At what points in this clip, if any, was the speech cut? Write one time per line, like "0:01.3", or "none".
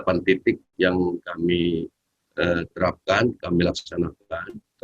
none